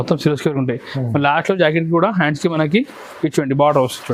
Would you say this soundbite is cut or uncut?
uncut